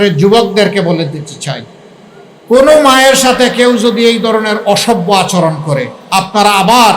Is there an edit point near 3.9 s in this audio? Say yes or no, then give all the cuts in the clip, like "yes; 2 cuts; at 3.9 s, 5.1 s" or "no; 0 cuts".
no; 1 cut; at 6.0 s